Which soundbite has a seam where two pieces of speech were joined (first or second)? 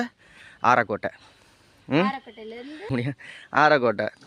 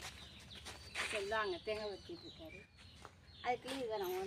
first